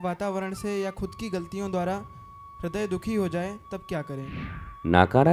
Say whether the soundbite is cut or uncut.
cut